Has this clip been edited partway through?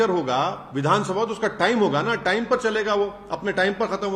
no; 0 cuts

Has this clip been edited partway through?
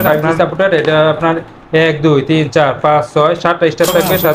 no; 0 cuts

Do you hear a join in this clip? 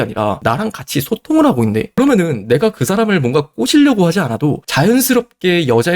yes; 1 cut; at 1.9 s

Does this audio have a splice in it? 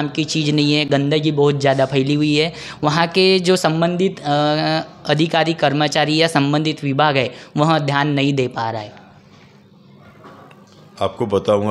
no; 0 cuts

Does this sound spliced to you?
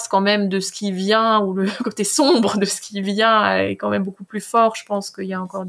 no; 0 cuts

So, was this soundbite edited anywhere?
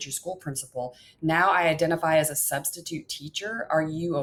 no; 0 cuts

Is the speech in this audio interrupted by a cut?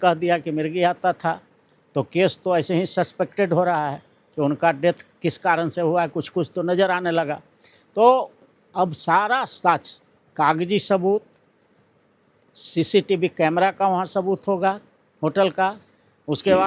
no; 0 cuts

